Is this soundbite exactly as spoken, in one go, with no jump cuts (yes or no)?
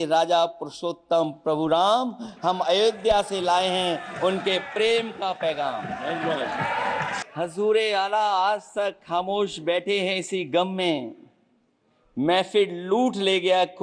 no